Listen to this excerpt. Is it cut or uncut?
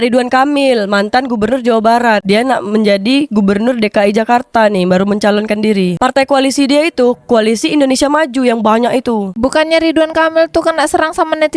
uncut